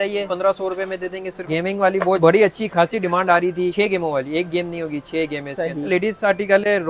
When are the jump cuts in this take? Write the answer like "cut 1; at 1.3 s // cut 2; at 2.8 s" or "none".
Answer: cut 1; at 1.5 s // cut 2; at 3.7 s // cut 3; at 5.9 s